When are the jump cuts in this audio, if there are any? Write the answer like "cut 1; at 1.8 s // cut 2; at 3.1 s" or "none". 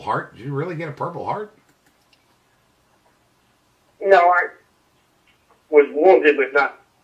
none